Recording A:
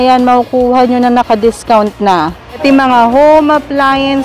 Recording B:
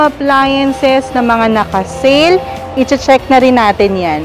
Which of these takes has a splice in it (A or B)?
A